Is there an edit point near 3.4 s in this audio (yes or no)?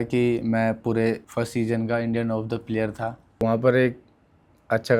yes